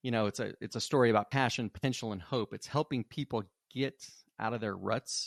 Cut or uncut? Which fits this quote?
uncut